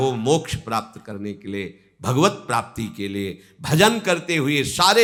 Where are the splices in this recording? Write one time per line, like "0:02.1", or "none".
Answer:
none